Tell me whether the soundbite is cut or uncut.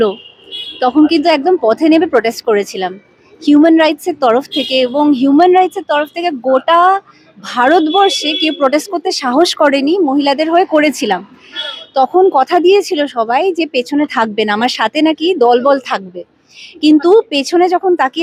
uncut